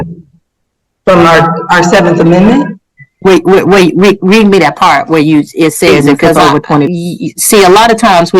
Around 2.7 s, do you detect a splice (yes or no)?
no